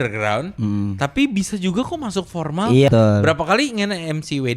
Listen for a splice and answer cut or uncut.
cut